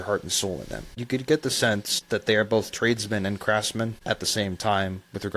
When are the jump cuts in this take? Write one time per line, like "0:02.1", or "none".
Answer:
0:01.0
0:01.9
0:04.0